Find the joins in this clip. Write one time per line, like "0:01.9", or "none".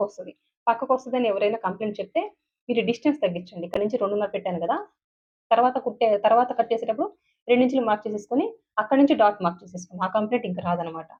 none